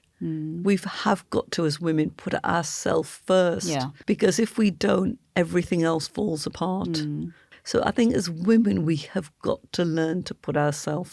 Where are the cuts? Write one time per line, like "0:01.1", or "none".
0:03.9
0:07.4